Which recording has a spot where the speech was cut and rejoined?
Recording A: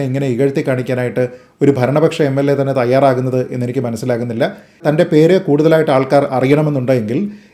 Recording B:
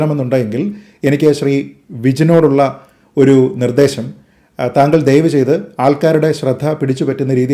A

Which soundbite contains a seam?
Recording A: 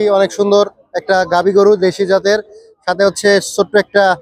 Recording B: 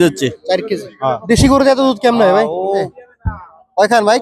B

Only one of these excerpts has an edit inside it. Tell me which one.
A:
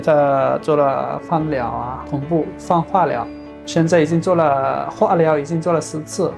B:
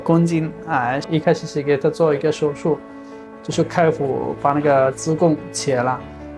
B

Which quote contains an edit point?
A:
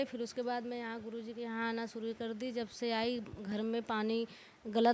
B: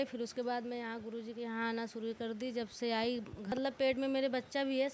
B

